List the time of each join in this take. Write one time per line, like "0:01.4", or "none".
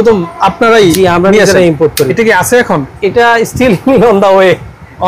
0:02.1